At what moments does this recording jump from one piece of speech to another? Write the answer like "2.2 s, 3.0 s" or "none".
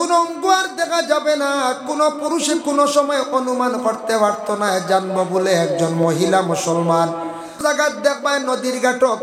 7.6 s